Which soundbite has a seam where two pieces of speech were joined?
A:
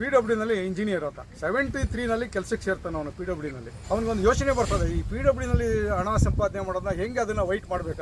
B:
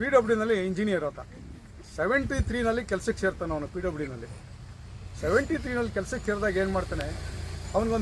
A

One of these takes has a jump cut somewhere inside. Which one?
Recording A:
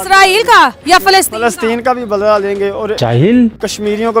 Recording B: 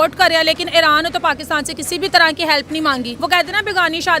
B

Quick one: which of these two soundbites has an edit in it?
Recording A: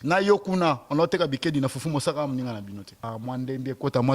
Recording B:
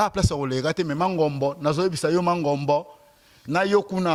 A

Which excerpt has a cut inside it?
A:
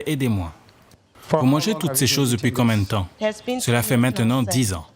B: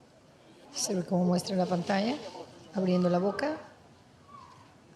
A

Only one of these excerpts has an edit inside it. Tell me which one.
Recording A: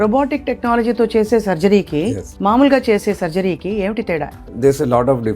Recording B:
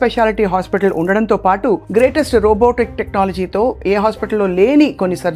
A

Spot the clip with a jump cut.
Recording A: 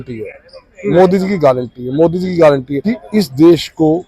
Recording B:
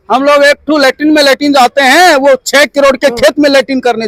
A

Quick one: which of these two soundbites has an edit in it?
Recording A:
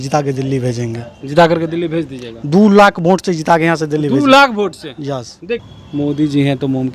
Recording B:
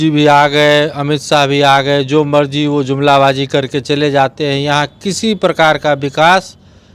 A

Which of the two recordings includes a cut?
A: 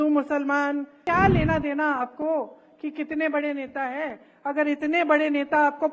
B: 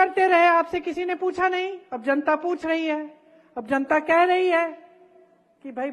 A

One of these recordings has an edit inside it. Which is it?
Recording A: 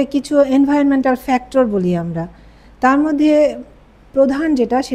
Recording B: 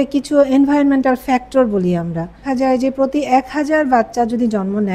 B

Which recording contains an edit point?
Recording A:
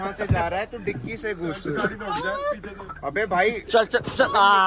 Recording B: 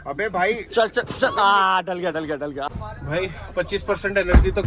B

